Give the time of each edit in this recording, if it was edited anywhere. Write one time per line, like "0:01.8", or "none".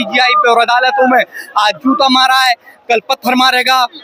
none